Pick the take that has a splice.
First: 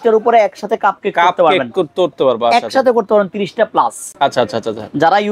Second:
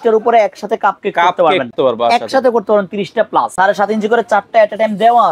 second; 2 cuts; at 1.7 s, 3.5 s

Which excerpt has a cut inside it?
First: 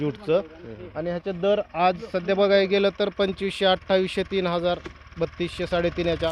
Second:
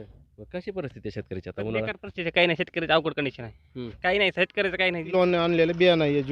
second; 1 cut; at 5.1 s

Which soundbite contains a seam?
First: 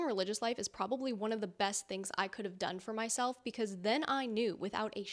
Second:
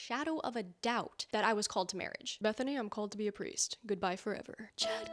second; 1 cut; at 2.3 s

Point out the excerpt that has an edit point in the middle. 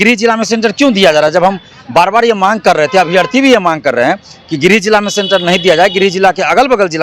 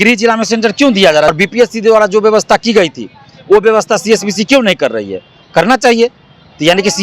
second; 1 cut; at 1.3 s

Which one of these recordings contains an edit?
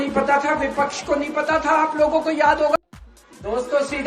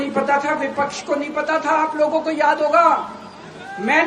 first; 1 cut; at 2.8 s

